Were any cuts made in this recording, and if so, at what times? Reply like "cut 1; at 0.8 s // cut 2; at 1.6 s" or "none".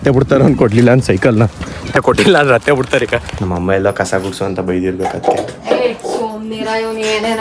cut 1; at 2.0 s // cut 2; at 3.3 s